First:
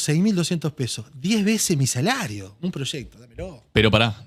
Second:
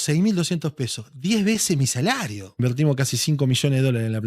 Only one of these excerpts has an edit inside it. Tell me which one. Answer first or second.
second